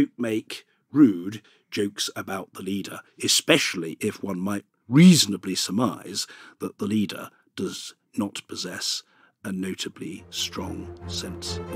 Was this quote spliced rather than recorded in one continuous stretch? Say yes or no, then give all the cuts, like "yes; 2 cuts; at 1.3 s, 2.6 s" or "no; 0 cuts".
yes; 1 cut; at 1.5 s